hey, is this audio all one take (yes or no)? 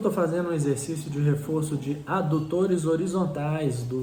yes